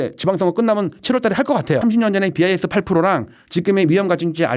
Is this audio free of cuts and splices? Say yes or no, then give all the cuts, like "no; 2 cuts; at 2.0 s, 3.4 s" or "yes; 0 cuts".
no; 1 cut; at 1.8 s